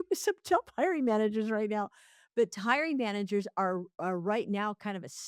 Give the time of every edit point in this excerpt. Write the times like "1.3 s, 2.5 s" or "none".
none